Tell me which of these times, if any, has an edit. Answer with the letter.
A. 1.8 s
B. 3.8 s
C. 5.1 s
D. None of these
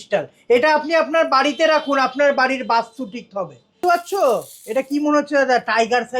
B